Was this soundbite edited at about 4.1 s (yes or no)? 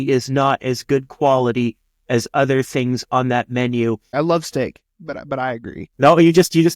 yes